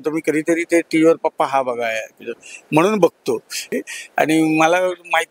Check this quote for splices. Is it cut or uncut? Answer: cut